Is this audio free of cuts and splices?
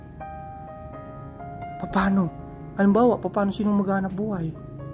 yes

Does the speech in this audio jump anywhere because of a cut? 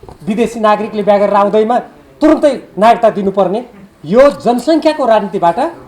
no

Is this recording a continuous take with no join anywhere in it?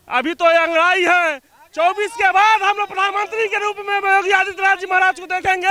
yes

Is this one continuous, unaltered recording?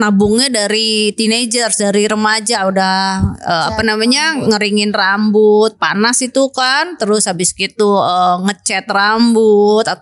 yes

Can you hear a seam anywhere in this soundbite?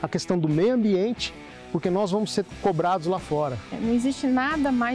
no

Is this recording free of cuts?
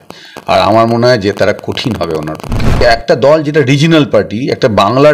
no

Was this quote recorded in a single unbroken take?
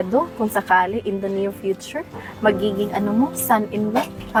yes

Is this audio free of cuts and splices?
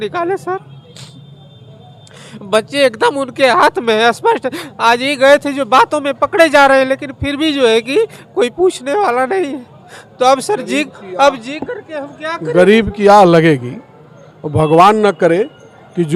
yes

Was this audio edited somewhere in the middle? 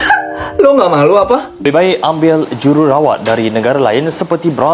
yes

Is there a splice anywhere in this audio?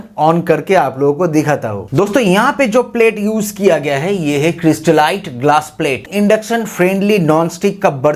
yes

